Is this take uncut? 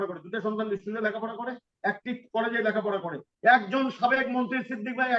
no; 1 cut; at 3.3 s

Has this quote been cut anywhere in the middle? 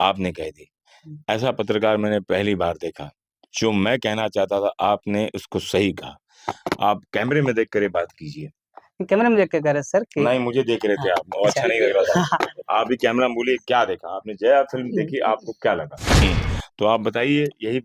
yes; 1 cut; at 16.2 s

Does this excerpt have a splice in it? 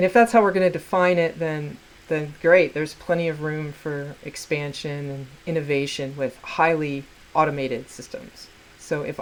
no; 0 cuts

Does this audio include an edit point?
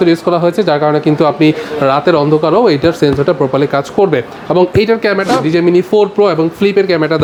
no; 0 cuts

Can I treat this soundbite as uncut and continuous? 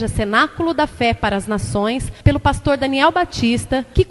yes; 0 cuts

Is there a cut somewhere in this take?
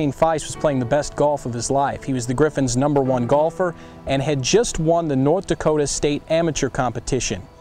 no; 0 cuts

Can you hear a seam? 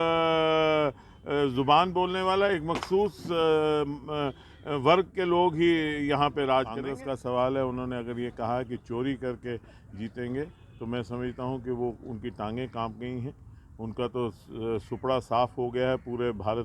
yes; 1 cut; at 6.8 s

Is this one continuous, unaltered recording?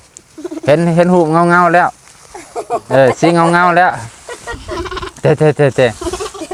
yes; 0 cuts

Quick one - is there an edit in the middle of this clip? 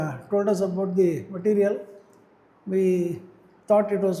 no; 0 cuts

